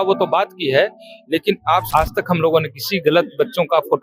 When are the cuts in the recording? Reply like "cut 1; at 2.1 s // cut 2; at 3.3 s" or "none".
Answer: cut 1; at 1.9 s